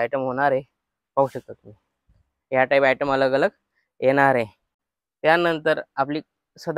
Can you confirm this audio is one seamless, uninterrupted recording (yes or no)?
yes